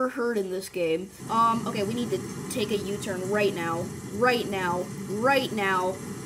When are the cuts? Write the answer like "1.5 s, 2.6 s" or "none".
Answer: 1.2 s